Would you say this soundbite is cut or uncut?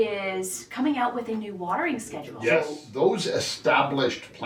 cut